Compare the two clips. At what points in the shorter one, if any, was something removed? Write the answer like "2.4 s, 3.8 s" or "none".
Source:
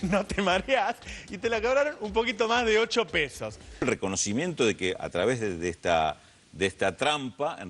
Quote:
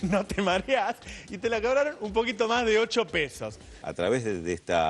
3.8 s